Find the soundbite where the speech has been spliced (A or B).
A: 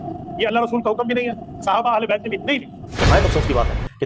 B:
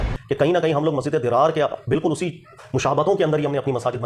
A